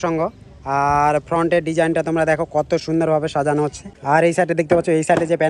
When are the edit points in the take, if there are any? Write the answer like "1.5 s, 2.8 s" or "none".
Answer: 3.9 s

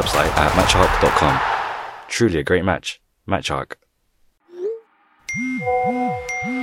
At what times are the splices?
4.5 s

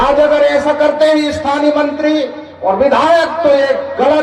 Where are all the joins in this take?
none

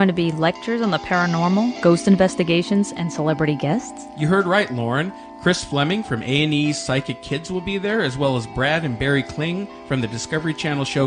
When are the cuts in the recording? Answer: none

